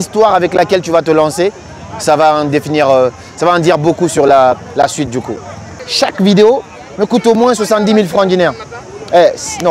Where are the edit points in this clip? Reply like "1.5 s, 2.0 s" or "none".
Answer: 5.7 s